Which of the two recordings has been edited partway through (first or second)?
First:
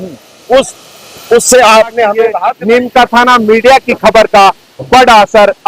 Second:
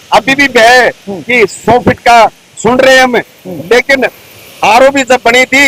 first